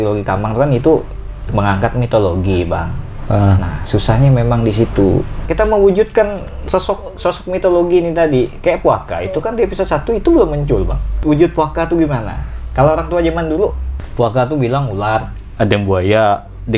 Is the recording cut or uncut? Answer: cut